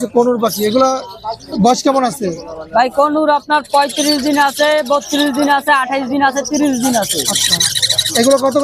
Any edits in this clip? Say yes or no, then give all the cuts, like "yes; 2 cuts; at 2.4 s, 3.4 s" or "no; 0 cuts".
no; 0 cuts